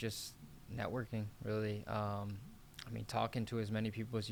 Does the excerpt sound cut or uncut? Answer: uncut